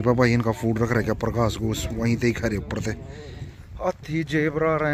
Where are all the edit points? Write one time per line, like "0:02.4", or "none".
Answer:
none